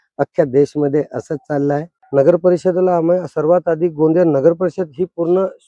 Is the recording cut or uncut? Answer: cut